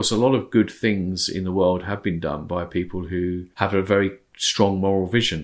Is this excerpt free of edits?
no; 1 cut; at 3.5 s

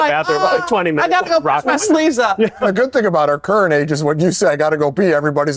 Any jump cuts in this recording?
yes; 1 cut; at 2.6 s

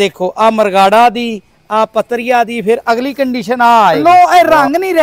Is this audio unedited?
no; 1 cut; at 4.0 s

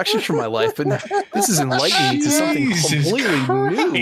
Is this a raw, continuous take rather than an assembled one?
yes; 0 cuts

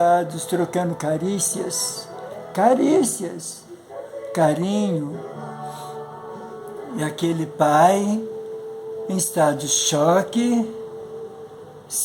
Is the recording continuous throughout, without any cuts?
no; 1 cut; at 6.7 s

